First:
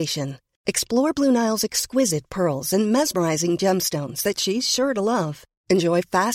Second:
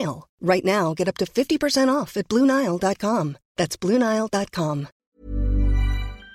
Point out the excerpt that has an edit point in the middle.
second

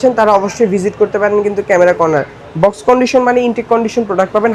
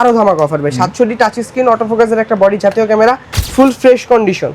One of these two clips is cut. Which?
second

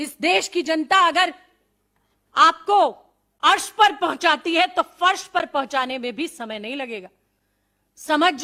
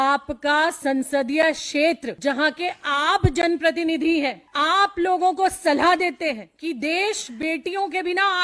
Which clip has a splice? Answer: second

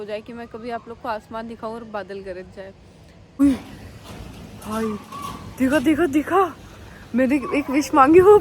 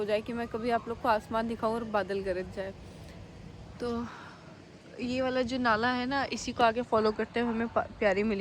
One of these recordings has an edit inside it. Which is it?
first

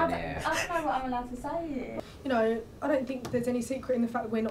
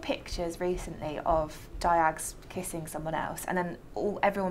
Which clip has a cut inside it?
first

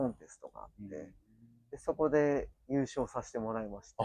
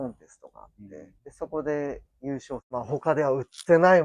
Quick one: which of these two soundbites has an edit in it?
second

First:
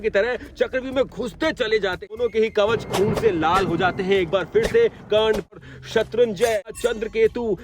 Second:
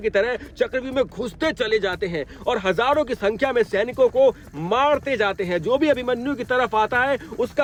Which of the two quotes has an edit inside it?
first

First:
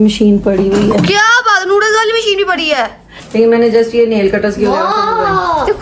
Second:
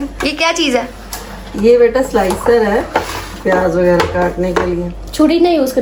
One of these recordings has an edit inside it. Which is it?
first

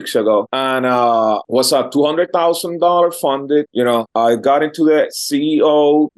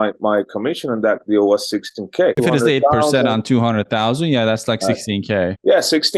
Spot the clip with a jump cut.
second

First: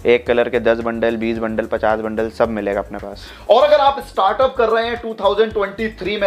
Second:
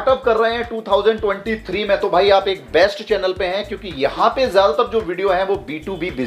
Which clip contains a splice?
first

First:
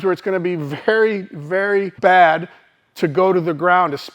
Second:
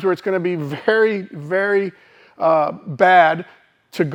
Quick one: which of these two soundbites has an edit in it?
first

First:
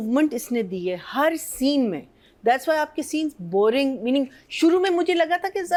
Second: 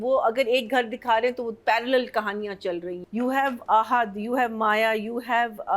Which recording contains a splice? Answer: second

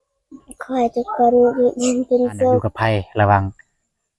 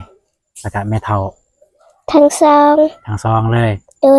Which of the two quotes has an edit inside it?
first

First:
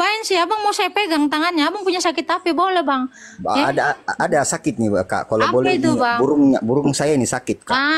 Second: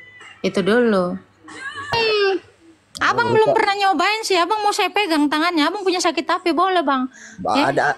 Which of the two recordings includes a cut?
second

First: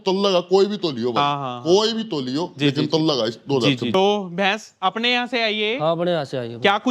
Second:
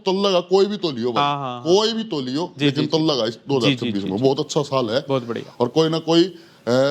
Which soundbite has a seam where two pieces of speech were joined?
first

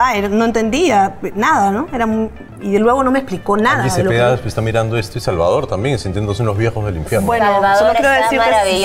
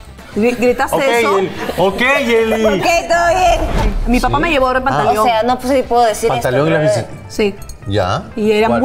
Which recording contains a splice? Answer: second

